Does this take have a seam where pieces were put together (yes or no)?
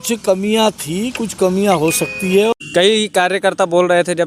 yes